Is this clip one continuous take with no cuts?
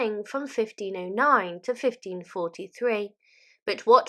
yes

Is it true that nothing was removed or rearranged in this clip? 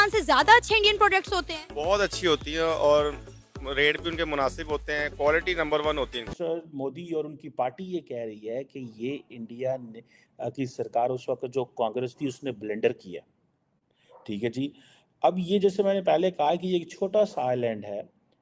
no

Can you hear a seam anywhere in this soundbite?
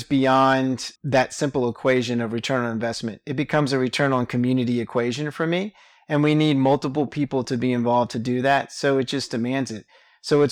yes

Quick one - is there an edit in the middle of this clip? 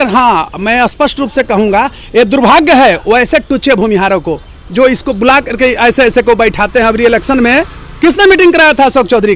no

